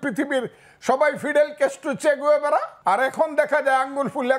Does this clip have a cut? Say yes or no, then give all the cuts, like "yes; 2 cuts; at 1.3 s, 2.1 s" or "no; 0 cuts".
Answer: yes; 1 cut; at 2.7 s